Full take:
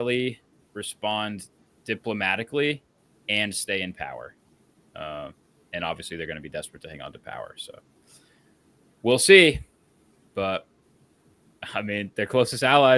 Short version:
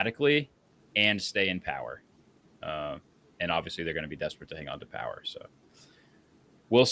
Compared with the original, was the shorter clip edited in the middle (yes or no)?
no